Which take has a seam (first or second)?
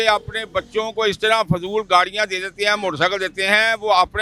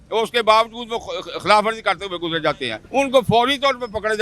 second